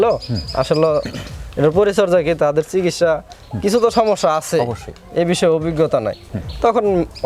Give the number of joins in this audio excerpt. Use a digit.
0